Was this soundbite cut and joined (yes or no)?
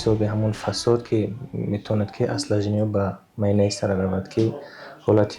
no